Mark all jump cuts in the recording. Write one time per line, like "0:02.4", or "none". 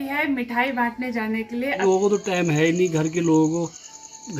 0:01.8